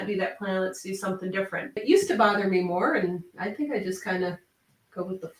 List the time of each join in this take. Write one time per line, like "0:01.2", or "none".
0:01.8